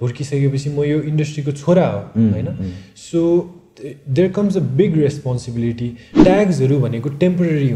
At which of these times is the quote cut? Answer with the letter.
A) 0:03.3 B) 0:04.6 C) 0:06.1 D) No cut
C